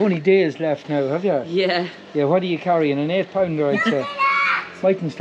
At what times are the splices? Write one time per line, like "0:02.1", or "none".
none